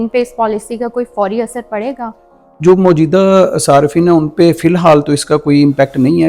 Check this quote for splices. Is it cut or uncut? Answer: uncut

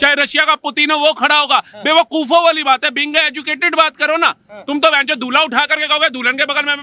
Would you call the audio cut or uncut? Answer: uncut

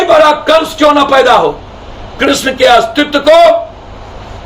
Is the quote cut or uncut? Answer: uncut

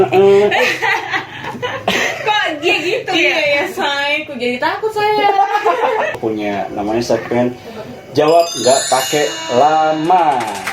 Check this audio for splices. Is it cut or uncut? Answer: cut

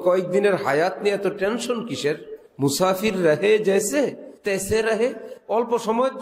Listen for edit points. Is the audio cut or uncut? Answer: cut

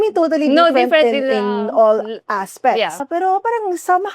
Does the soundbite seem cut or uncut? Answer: cut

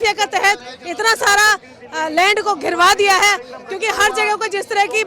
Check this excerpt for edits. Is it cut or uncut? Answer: uncut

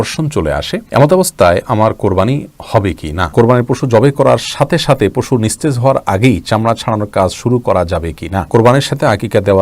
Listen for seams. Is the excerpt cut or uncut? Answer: cut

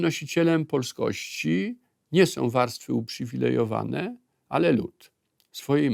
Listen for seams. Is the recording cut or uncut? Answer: uncut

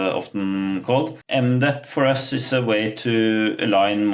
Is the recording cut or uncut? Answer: cut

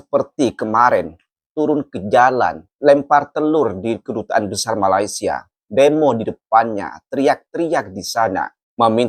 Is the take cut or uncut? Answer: uncut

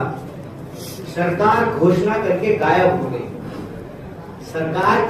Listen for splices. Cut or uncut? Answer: uncut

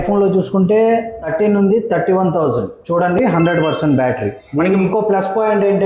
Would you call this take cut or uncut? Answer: cut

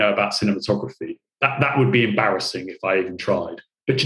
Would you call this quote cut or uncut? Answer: cut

